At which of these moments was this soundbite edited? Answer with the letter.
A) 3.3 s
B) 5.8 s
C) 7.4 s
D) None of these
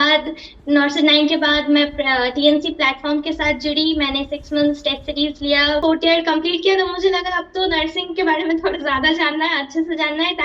B